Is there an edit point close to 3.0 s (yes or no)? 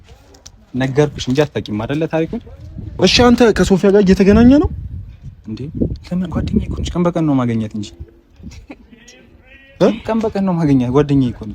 yes